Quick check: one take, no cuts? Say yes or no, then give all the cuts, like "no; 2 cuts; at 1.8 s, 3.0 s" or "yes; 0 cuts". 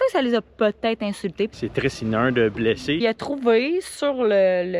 no; 2 cuts; at 1.5 s, 3.0 s